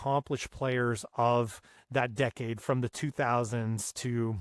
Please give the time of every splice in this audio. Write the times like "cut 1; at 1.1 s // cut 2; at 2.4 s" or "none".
none